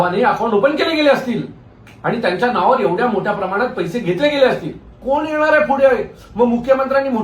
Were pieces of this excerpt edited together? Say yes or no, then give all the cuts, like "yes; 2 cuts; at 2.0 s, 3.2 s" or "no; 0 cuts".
yes; 1 cut; at 5.0 s